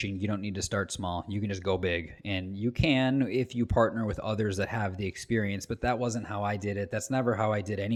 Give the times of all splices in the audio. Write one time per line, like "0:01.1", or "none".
none